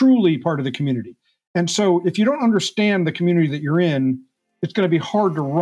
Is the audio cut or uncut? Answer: uncut